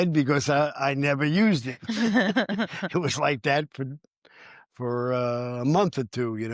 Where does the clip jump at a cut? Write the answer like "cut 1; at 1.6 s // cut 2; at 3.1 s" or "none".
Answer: none